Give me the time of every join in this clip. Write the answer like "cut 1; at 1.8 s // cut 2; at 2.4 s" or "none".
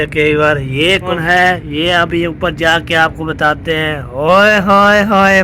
cut 1; at 1.1 s